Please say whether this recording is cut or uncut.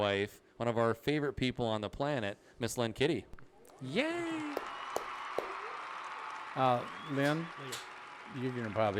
uncut